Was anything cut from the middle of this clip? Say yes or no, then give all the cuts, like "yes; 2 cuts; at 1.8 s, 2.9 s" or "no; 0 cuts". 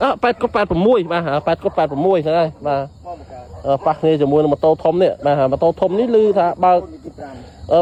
no; 0 cuts